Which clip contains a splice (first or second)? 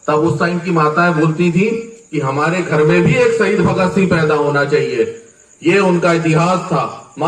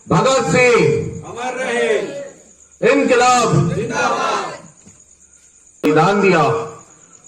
second